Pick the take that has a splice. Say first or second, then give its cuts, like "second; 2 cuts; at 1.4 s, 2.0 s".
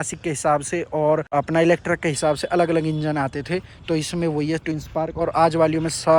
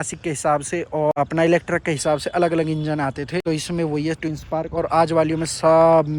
second; 2 cuts; at 1.1 s, 3.4 s